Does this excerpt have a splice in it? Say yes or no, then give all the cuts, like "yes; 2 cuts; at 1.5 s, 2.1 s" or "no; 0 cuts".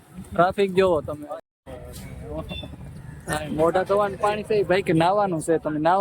yes; 1 cut; at 1.4 s